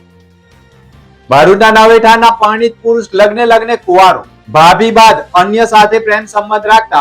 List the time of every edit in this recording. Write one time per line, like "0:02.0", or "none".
0:01.3